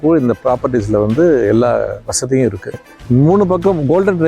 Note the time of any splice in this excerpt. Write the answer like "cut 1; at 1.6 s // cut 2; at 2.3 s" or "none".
cut 1; at 2.8 s